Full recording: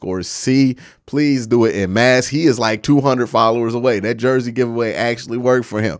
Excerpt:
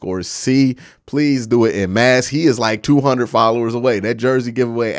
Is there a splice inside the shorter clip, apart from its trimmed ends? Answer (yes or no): no